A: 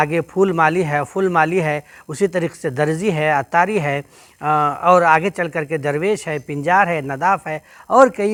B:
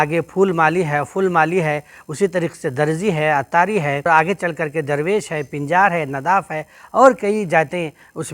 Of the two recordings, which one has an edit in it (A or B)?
B